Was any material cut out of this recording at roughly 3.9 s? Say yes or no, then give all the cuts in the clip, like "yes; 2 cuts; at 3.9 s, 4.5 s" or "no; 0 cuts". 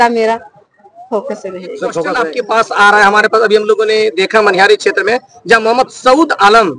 no; 1 cut; at 2.3 s